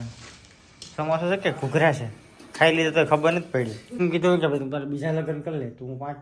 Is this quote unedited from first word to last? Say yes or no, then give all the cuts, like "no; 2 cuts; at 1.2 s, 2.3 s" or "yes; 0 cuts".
no; 1 cut; at 4.0 s